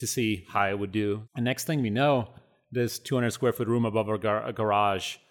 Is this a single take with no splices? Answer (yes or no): no